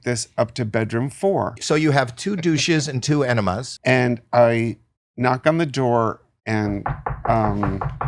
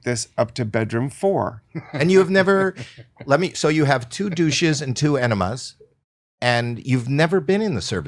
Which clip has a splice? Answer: first; 2 cuts; at 1.6 s, 3.7 s

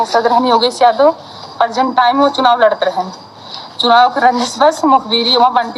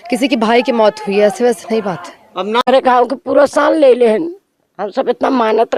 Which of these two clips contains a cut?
second; 1 cut; at 2.6 s

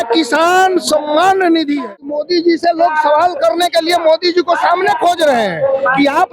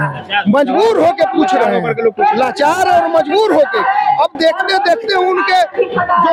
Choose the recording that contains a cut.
first; 1 cut; at 2.0 s

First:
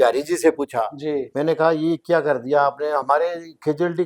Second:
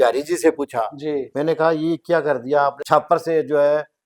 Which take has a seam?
second; 1 cut; at 2.8 s

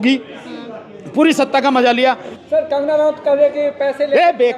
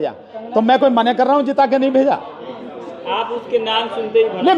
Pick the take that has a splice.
first; 1 cut; at 2.3 s

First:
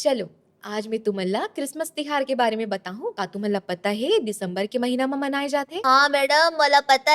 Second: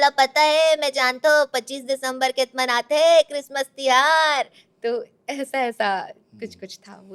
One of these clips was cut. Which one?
first; 2 cuts; at 3.2 s, 5.7 s

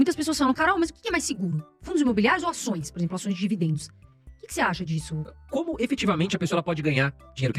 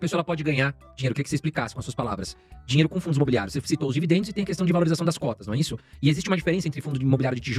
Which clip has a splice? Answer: first; 1 cut; at 5.4 s

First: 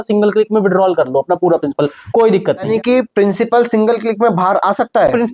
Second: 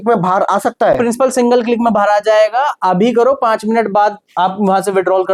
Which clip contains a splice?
first; 1 cut; at 2.7 s

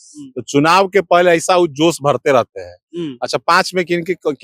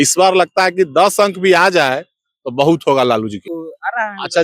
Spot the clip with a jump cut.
second; 1 cut; at 3.4 s

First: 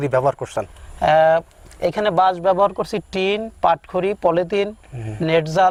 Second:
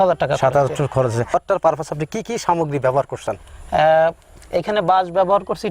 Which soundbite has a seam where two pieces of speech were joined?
second; 1 cut; at 1.3 s

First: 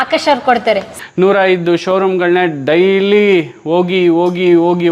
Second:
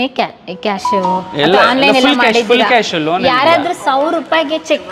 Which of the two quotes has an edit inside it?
first; 1 cut; at 1.0 s

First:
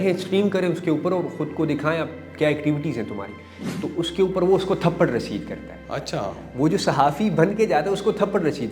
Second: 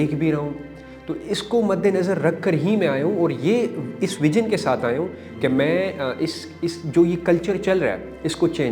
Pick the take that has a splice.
first; 1 cut; at 3.5 s

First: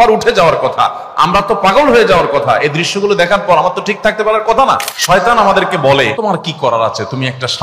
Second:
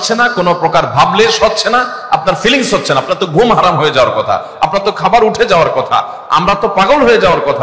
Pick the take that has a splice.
first; 2 cuts; at 4.9 s, 6.1 s

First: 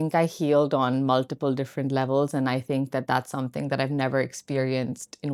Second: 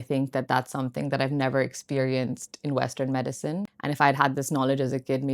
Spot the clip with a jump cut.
second; 1 cut; at 3.7 s

